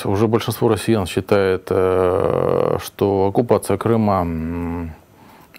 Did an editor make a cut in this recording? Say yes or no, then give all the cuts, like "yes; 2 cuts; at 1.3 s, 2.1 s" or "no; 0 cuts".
no; 0 cuts